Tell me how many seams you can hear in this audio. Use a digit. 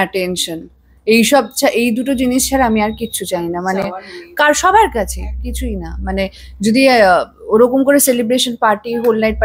0